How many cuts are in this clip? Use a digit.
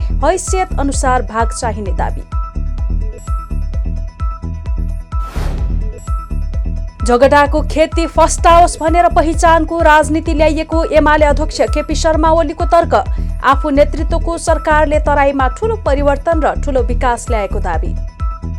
0